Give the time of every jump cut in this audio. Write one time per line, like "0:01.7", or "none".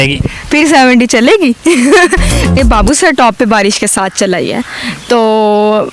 0:02.6

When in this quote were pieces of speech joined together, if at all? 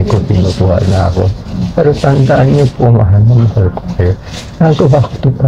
none

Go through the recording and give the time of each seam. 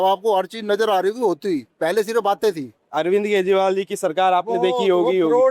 0:01.7
0:02.8

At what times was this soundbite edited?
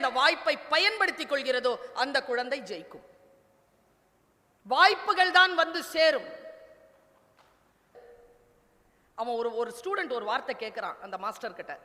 0:07.9

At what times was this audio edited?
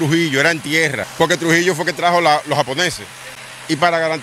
0:01.0

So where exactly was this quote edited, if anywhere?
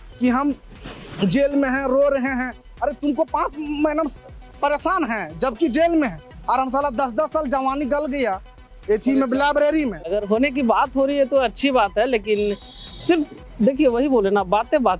none

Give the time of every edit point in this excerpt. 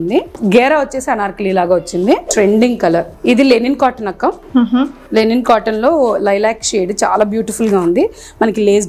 0:02.3
0:03.1

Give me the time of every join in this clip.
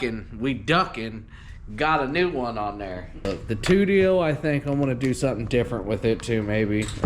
0:03.3

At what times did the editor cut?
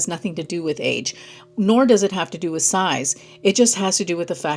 none

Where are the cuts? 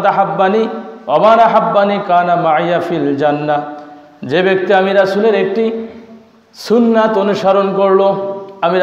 none

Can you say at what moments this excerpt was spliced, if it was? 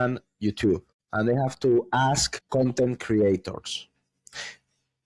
0:01.0
0:02.3

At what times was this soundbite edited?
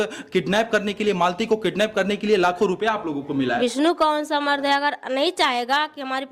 0:03.6

